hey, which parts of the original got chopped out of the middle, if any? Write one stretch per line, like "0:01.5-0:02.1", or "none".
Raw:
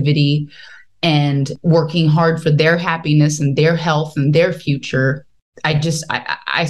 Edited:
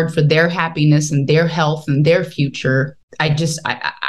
0:05.3-0:05.5